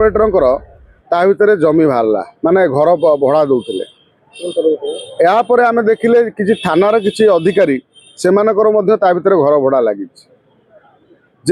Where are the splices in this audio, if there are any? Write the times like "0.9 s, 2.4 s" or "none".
none